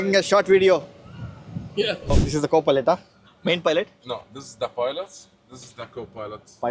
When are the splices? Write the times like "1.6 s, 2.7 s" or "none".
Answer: 2.2 s